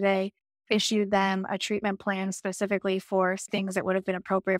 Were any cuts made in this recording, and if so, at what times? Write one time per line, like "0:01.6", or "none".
0:03.5